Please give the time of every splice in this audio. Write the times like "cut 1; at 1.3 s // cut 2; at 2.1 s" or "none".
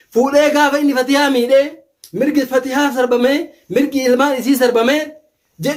none